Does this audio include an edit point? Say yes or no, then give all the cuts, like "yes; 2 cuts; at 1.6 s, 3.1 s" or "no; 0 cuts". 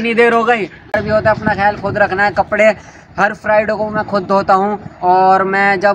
yes; 1 cut; at 1.0 s